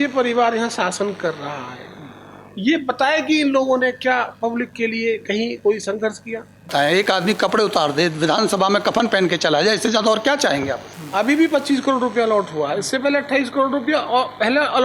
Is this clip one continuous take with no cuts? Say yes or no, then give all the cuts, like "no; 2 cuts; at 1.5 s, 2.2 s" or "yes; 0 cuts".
no; 2 cuts; at 6.7 s, 10.8 s